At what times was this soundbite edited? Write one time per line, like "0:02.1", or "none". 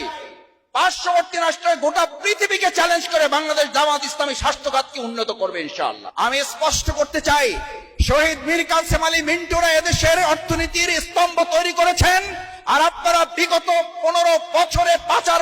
0:06.0